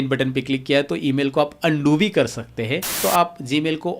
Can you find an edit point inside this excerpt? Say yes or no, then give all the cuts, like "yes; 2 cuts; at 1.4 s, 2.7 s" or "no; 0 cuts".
yes; 1 cut; at 3.0 s